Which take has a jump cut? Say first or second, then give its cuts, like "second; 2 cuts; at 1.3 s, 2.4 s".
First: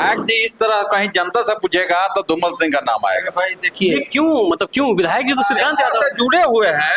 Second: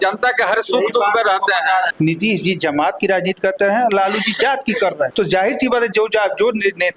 second; 2 cuts; at 1.9 s, 5.1 s